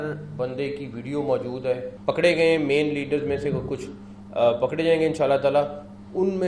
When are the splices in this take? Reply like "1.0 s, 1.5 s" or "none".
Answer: 1.9 s